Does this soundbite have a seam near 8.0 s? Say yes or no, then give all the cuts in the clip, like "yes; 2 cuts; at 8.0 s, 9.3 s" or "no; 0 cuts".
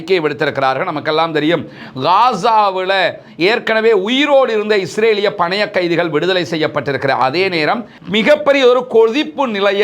yes; 1 cut; at 8.0 s